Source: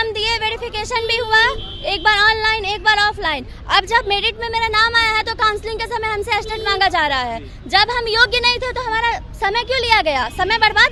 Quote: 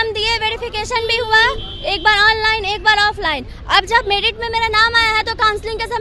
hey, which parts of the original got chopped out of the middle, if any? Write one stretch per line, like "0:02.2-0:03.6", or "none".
none